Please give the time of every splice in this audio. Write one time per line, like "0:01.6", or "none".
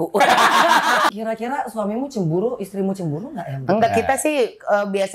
0:01.1